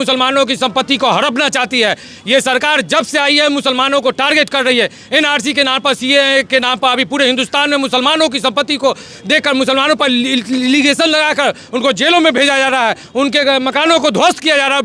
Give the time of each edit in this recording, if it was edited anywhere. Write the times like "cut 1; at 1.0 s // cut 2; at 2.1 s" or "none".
none